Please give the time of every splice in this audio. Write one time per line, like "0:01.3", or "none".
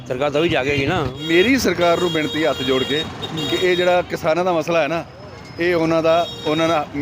0:01.1